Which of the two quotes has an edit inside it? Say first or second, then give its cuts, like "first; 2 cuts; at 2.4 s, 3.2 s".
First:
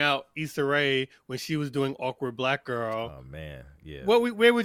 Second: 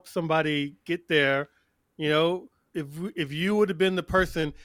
second; 1 cut; at 2.6 s